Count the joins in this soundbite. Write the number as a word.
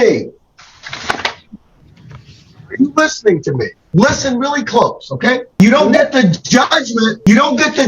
one